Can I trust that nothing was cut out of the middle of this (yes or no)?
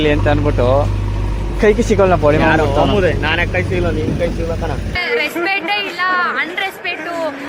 yes